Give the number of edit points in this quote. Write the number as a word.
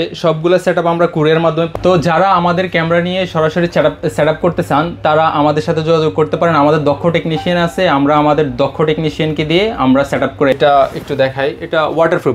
two